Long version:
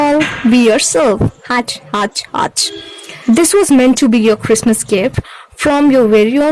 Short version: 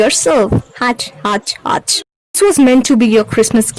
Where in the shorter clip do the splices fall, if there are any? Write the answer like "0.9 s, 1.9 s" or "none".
2.4 s